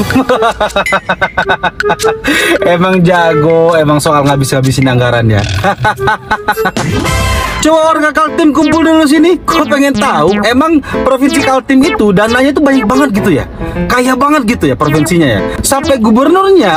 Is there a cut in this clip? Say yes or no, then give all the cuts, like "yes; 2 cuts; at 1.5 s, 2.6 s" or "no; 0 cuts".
no; 0 cuts